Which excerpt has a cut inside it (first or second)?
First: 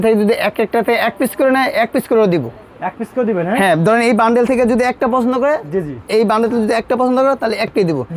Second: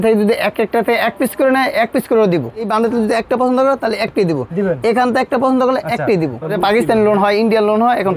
second